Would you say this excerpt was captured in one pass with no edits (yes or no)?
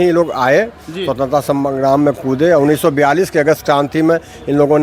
yes